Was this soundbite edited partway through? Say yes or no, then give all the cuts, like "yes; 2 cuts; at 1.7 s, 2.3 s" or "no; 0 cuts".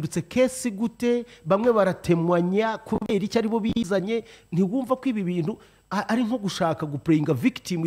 no; 0 cuts